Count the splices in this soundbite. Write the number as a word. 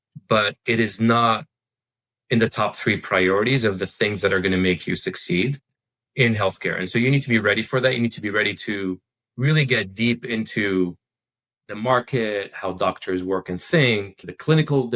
zero